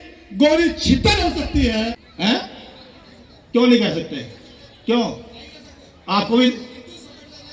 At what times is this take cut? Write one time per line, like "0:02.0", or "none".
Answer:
0:02.1